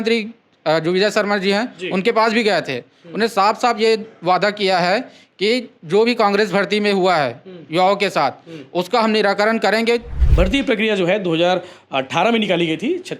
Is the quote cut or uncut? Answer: cut